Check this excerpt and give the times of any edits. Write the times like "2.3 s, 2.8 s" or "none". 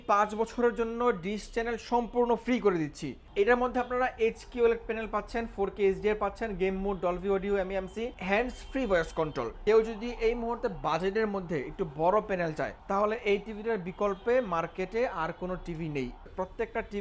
3.2 s, 8.2 s, 9.5 s, 12.8 s, 16.3 s